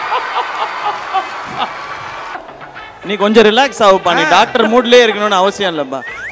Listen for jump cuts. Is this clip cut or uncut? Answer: cut